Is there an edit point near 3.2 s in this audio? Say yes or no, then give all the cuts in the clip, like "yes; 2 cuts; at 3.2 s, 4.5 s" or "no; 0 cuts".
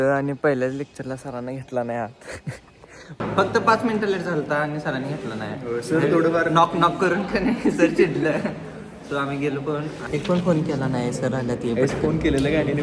yes; 2 cuts; at 3.2 s, 10.0 s